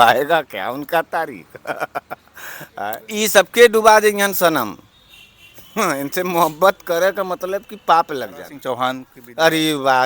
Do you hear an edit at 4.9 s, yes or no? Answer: no